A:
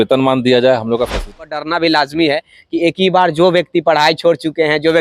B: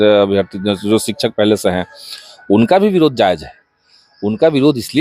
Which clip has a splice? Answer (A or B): A